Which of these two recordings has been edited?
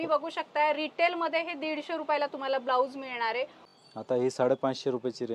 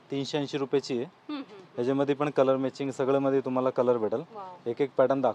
first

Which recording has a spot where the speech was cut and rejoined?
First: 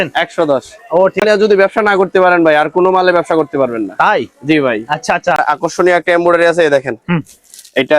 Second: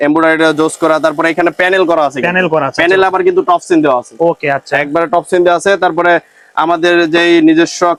first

